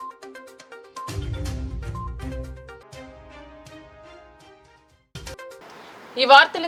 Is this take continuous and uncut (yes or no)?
yes